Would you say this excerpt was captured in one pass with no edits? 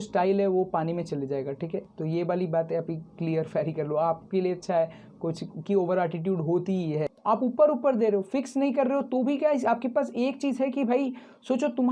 no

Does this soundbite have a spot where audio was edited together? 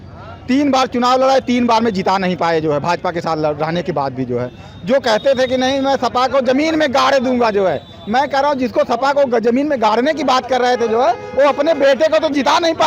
no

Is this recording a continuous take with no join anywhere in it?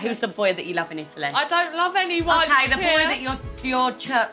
yes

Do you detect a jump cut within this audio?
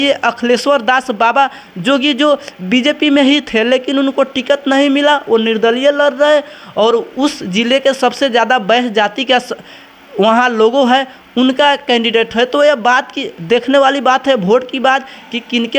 no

